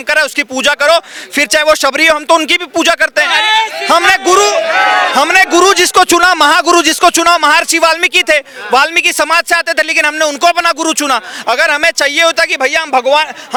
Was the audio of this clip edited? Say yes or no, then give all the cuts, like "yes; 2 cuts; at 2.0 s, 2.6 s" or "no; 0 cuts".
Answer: no; 0 cuts